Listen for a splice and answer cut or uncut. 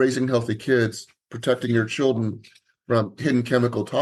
uncut